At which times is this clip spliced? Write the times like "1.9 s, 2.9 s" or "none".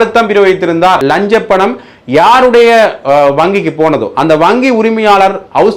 1.0 s